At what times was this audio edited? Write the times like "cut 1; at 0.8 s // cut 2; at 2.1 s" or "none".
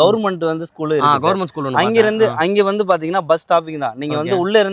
none